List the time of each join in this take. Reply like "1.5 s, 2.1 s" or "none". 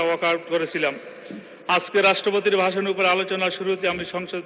none